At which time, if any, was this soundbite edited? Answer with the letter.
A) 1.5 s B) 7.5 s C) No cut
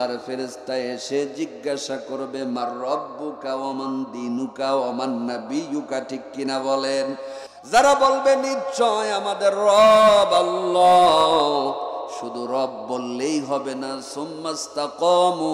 B